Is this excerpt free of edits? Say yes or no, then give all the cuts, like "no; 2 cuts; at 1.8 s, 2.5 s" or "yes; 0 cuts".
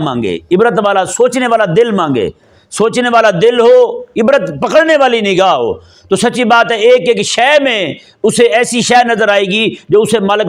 yes; 0 cuts